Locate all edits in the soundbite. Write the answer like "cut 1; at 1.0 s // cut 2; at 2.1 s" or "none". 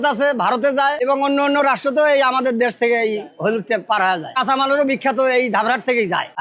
none